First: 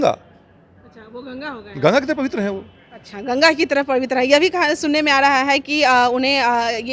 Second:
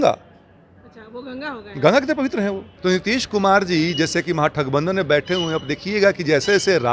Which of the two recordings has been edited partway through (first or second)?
second